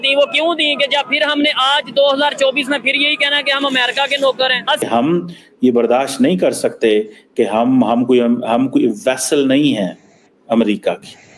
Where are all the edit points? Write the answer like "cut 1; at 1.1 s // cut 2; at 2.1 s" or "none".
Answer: cut 1; at 4.8 s